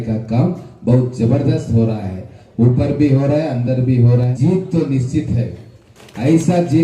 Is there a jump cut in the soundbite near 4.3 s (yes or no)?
yes